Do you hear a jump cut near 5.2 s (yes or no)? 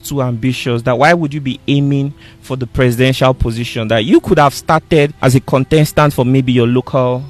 yes